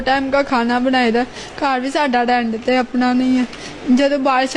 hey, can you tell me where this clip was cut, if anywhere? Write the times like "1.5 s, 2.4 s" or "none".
none